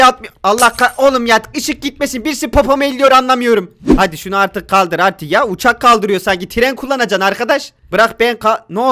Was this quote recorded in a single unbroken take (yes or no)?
no